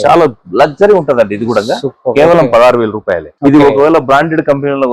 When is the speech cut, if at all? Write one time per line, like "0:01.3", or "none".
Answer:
0:03.3